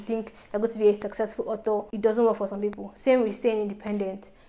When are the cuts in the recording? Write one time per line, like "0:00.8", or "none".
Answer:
0:01.9